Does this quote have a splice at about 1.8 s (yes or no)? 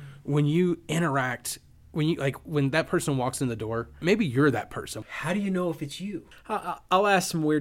no